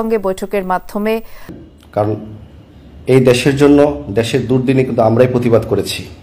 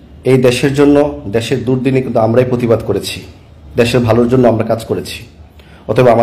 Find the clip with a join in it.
first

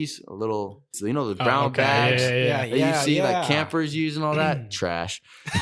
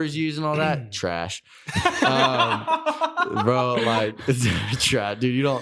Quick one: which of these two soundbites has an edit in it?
first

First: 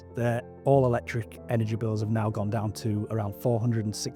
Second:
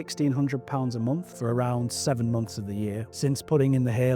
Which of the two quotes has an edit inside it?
second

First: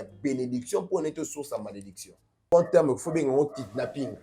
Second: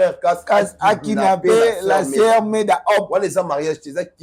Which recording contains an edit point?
first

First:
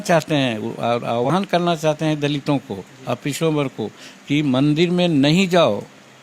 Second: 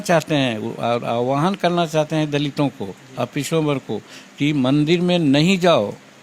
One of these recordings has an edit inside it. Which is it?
first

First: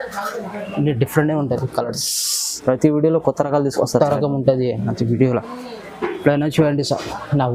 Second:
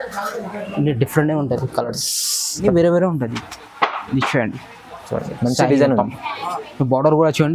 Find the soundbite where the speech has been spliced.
second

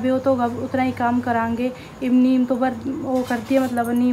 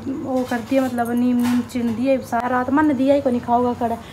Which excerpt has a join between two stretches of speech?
second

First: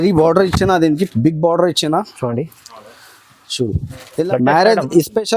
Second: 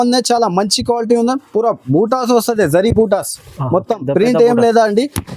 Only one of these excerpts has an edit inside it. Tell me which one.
first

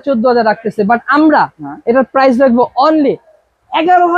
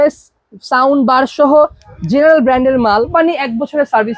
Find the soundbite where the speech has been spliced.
second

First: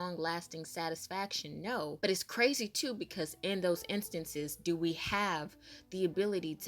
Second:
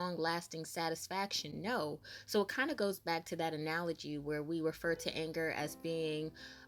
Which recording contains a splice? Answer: first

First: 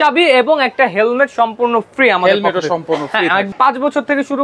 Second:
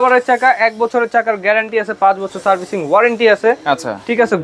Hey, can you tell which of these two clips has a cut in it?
first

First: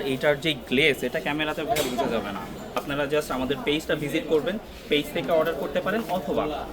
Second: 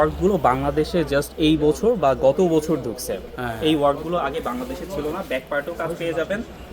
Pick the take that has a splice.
first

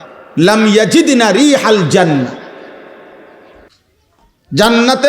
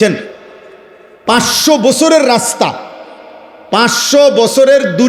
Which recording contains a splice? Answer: first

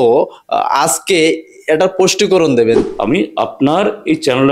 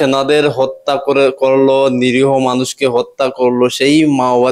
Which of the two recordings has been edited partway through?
first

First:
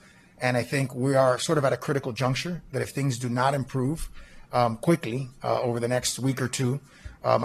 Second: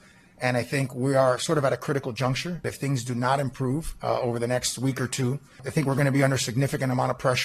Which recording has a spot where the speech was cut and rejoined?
second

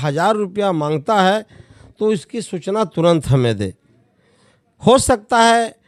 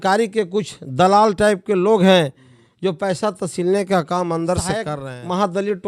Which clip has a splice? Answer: second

